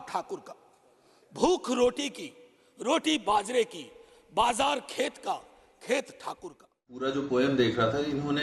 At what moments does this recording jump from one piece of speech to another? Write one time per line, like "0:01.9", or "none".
0:07.0